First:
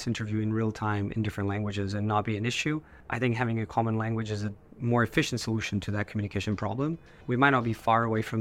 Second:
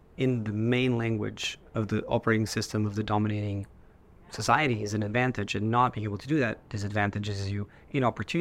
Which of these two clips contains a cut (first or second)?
first